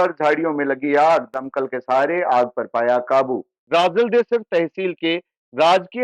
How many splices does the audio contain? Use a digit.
1